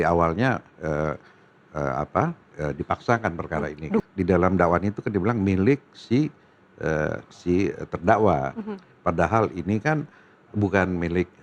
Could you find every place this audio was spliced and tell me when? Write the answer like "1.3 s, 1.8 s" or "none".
4.0 s